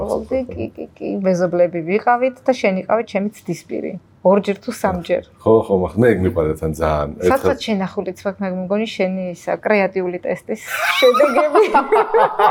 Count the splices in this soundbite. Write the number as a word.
zero